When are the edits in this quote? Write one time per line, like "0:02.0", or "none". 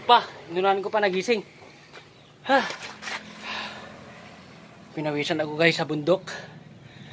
0:03.1